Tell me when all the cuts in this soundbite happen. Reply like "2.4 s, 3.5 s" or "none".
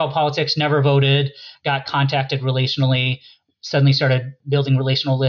4.4 s